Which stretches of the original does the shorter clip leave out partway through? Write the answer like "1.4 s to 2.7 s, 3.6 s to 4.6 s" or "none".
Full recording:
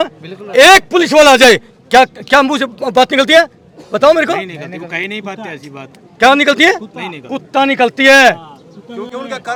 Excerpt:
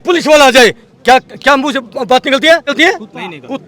3.6 s to 6.5 s

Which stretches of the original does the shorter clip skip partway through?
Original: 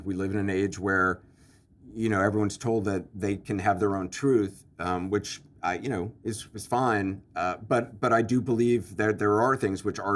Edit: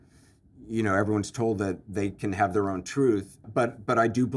4.7 s to 7.6 s

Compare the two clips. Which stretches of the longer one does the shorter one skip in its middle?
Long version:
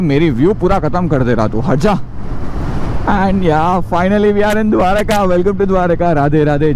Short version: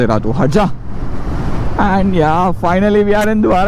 none

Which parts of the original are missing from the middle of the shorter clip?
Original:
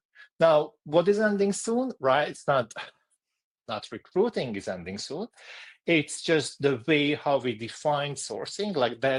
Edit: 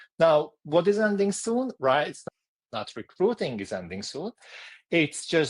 2.4 s to 3.1 s

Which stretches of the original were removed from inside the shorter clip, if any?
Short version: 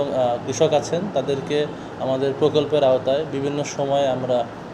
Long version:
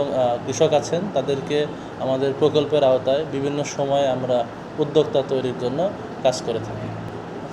none

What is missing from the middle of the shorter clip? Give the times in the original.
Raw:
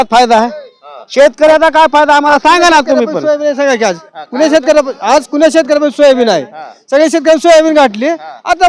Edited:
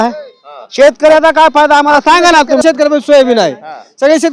3.0 s to 5.5 s

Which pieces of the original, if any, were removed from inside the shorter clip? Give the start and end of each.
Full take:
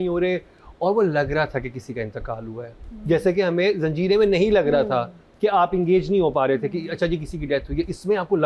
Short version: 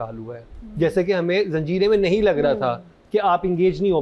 none

